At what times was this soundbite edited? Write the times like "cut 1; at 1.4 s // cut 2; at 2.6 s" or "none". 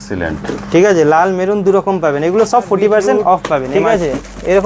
cut 1; at 3.7 s